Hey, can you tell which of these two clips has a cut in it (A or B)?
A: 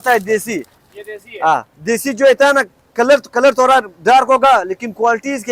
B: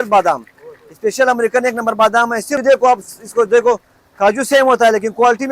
B